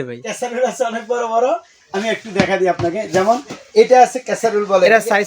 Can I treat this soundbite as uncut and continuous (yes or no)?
yes